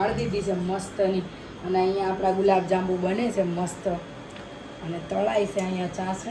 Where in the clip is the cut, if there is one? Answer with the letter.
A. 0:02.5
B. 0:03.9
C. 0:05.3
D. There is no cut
D